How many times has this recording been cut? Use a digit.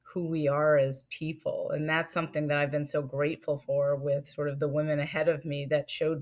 0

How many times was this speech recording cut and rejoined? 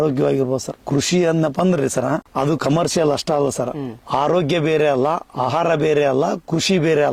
0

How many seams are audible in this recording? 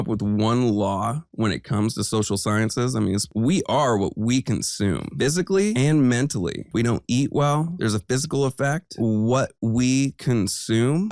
2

